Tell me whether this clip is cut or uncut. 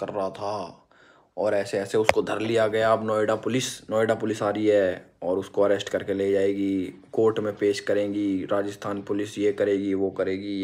uncut